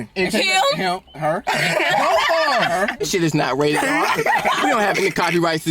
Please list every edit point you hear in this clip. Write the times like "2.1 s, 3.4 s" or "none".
3.1 s